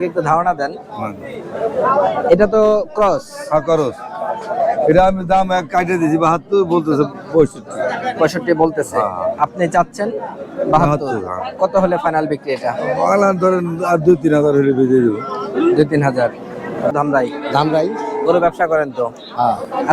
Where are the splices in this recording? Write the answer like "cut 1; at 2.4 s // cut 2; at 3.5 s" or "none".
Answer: cut 1; at 16.9 s